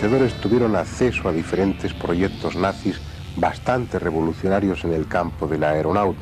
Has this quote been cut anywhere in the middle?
yes; 1 cut; at 3.6 s

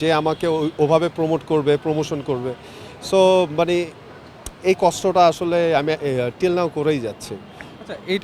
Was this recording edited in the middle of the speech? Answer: no; 0 cuts

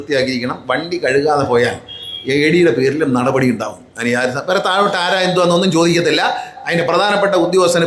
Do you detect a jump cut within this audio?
no; 0 cuts

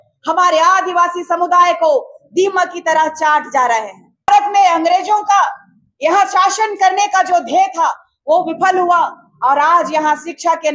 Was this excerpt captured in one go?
no; 1 cut; at 4.3 s

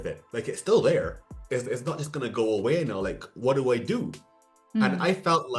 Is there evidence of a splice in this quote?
no; 0 cuts

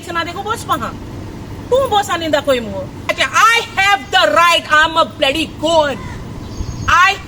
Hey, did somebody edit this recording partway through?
yes; 1 cut; at 3.1 s

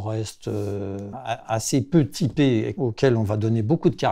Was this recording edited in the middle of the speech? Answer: yes; 2 cuts; at 1.1 s, 2.7 s

